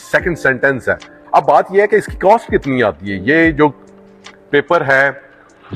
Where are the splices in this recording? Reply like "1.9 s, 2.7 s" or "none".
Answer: 1.1 s